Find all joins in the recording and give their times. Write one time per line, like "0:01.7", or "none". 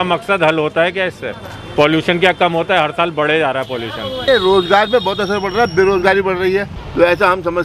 0:04.2
0:06.8